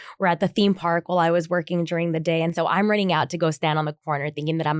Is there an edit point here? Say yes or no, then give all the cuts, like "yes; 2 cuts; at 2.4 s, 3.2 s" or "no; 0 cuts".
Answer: yes; 1 cut; at 2.5 s